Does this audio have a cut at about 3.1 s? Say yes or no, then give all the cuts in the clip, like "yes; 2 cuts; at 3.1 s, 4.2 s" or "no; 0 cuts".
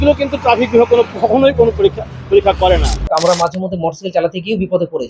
yes; 1 cut; at 3.1 s